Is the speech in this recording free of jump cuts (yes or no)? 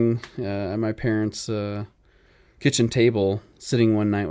yes